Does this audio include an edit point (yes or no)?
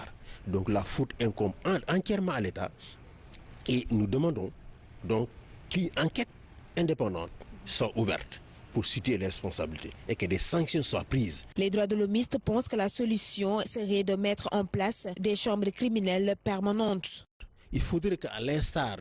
no